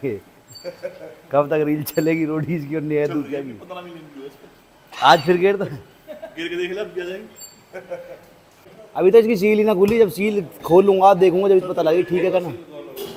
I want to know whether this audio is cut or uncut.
uncut